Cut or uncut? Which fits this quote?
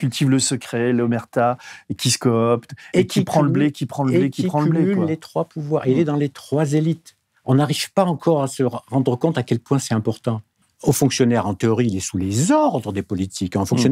cut